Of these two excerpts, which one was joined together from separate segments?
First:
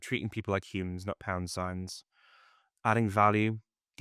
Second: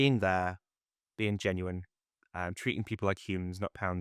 first; 1 cut; at 2.7 s

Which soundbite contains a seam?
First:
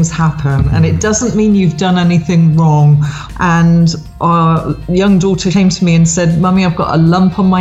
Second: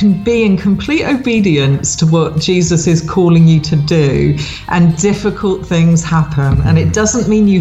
first; 2 cuts; at 3.2 s, 5.5 s

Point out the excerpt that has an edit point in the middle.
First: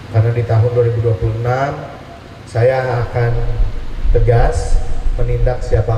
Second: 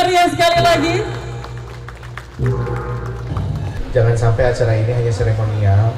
second; 1 cut; at 3.8 s

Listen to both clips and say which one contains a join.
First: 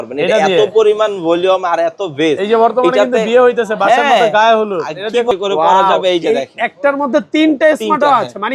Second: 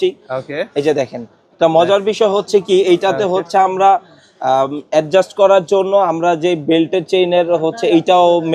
first; 1 cut; at 5.3 s

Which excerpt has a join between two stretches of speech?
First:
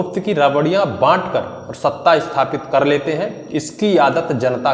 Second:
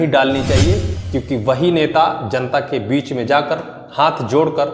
second; 1 cut; at 0.9 s

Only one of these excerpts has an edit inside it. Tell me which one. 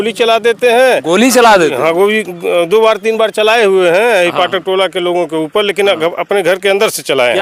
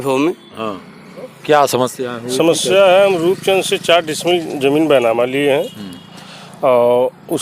second; 1 cut; at 1.3 s

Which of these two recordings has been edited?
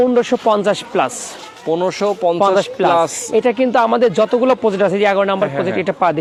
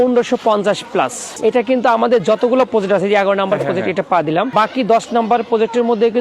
second; 2 cuts; at 1.3 s, 4.5 s

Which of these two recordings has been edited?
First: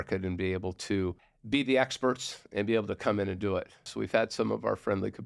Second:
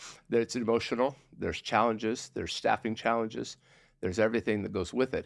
first; 2 cuts; at 1.3 s, 3.9 s

